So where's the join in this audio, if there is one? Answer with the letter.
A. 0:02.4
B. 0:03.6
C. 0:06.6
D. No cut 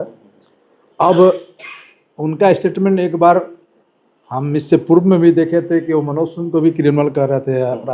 D